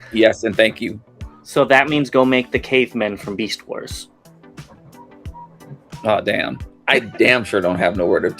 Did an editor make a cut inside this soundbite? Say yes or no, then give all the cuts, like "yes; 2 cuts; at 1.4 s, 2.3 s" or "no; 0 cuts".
yes; 1 cut; at 6.7 s